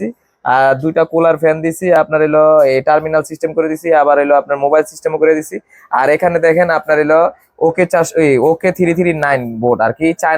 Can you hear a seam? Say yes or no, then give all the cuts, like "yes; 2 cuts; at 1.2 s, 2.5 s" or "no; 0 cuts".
no; 0 cuts